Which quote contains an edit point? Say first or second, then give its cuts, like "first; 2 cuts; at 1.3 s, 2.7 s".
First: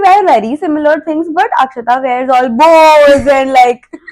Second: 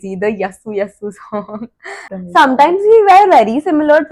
second; 1 cut; at 2.1 s